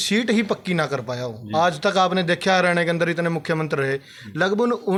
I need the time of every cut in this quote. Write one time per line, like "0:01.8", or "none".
none